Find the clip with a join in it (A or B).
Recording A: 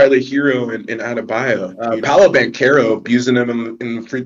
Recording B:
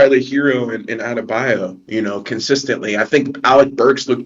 A